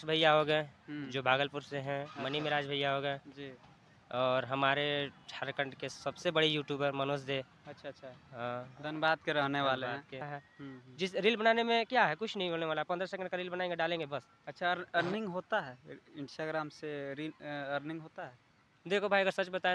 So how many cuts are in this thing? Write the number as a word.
one